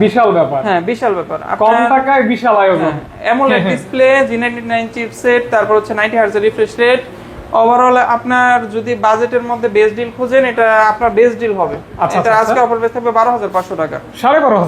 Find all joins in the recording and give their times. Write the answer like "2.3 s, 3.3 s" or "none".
none